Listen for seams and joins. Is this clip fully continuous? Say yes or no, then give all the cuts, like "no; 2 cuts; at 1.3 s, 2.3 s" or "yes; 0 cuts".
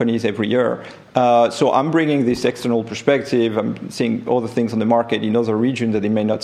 yes; 0 cuts